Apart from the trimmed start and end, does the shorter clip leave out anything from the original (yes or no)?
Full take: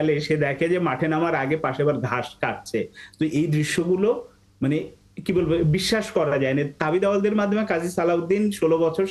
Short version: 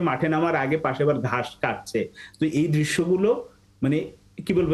no